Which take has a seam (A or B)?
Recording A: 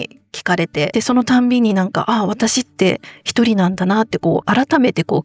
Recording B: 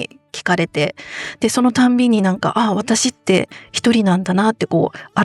A